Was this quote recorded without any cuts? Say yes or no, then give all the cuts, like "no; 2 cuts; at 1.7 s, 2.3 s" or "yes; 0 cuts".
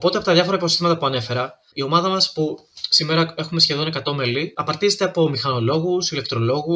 no; 2 cuts; at 1.7 s, 4.6 s